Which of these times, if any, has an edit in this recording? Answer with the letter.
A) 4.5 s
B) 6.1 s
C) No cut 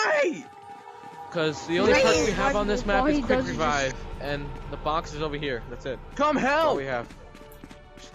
C